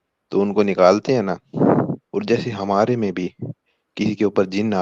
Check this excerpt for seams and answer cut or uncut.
cut